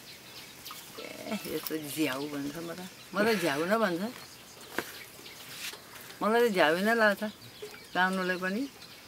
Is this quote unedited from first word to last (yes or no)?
yes